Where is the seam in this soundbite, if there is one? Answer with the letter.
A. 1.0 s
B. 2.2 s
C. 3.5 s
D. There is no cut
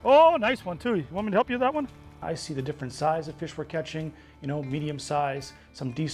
B